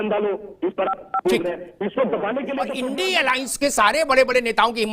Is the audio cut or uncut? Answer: cut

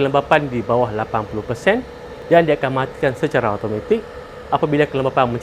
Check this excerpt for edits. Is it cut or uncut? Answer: uncut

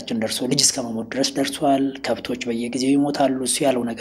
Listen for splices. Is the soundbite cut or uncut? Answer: uncut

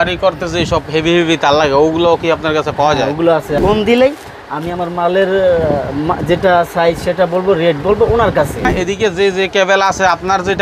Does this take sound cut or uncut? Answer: cut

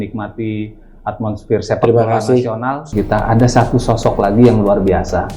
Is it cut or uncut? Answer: cut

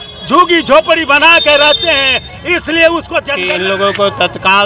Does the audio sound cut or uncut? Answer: cut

